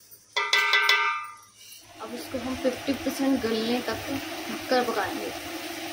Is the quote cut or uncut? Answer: cut